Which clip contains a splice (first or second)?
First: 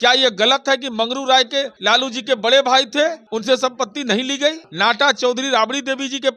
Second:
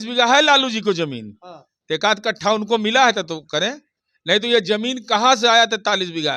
first